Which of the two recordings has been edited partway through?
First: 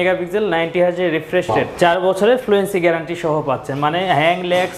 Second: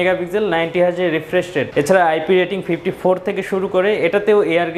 first; 1 cut; at 1.6 s

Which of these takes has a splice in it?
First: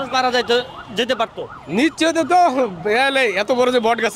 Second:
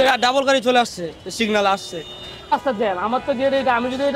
second; 1 cut; at 2.5 s

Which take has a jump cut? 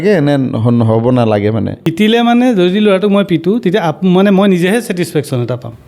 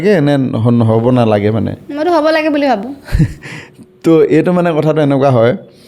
first; 1 cut; at 1.8 s

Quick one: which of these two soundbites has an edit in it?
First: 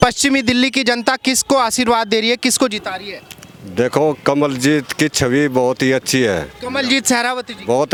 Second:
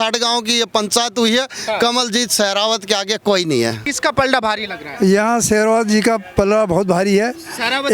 second; 1 cut; at 3.9 s

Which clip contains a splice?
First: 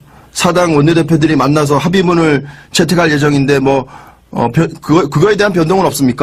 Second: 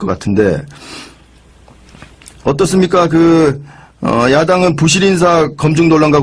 second; 1 cut; at 2.6 s

